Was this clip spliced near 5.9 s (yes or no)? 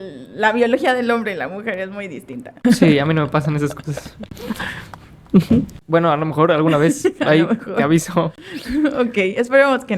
no